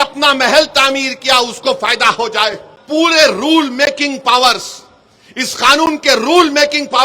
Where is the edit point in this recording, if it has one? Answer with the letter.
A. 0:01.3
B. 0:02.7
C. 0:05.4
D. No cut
B